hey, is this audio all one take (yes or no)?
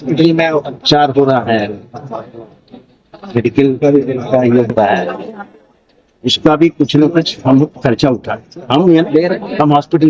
yes